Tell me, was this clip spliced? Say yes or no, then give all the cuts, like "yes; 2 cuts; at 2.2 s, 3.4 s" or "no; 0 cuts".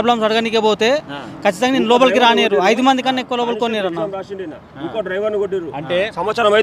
no; 0 cuts